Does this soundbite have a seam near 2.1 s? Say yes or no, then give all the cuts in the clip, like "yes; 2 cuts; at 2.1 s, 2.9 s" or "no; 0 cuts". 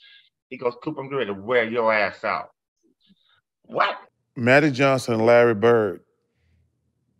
no; 1 cut; at 4.0 s